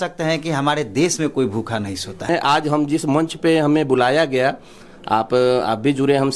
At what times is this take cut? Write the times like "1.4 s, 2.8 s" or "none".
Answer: 2.3 s

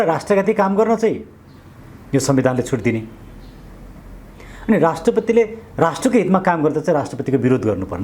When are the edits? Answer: none

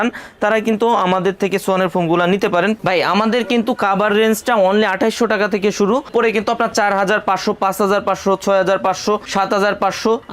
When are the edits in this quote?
2.8 s, 6.1 s

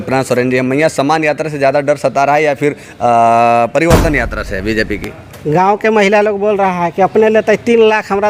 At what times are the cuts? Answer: none

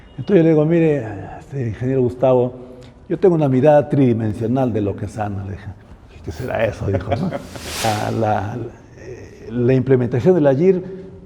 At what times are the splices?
7.9 s

